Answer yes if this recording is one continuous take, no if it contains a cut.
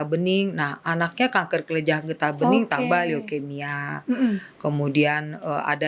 yes